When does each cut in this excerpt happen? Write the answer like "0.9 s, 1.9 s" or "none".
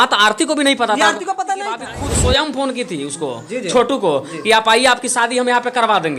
1.8 s